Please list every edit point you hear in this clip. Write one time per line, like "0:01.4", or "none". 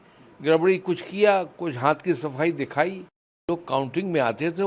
0:03.5

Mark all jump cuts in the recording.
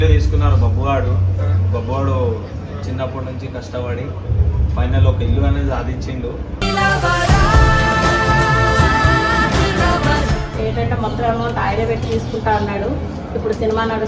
0:10.5

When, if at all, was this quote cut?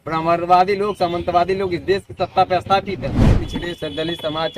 0:03.2

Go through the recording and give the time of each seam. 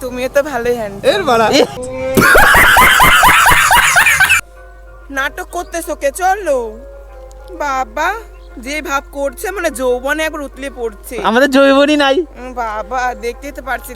0:04.3

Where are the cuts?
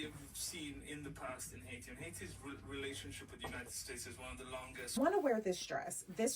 0:05.0

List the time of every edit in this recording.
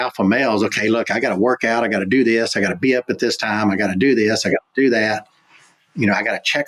none

